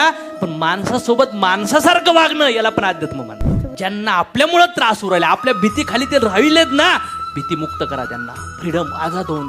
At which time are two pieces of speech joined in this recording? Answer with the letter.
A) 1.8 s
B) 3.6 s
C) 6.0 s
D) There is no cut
B